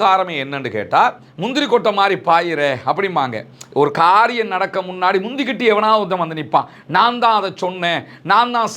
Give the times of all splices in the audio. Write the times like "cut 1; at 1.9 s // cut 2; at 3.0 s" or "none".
cut 1; at 1.2 s